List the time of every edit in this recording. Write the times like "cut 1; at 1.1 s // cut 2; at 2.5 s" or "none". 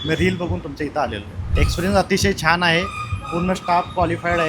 cut 1; at 1.2 s